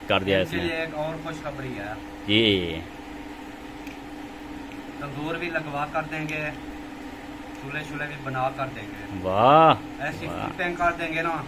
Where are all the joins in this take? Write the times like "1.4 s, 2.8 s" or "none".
none

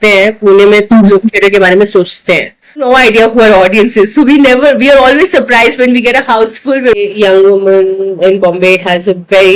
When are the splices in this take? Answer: 2.8 s, 7.0 s

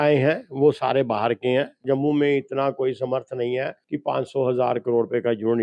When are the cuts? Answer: 1.8 s

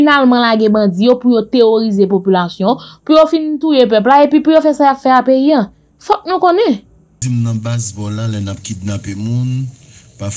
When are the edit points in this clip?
7.2 s

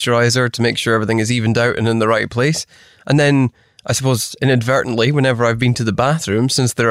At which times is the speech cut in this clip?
none

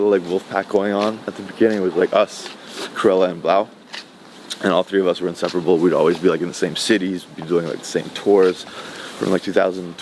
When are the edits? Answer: none

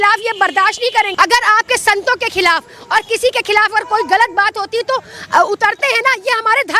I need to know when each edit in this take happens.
1.1 s

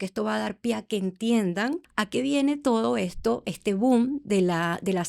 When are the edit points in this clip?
1.9 s

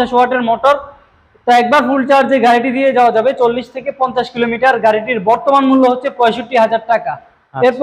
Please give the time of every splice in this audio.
none

